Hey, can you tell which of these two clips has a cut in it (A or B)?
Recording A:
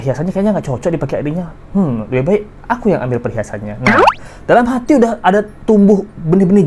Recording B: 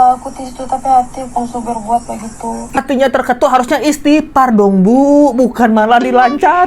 B